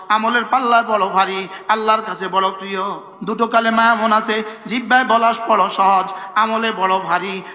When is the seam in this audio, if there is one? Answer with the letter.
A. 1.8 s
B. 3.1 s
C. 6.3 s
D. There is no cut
B